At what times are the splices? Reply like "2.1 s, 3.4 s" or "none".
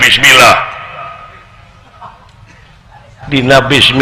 none